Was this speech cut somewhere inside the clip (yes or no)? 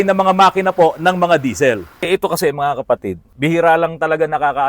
yes